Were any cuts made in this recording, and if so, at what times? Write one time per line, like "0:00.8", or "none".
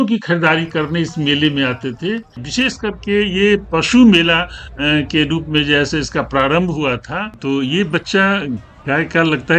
0:02.4
0:07.4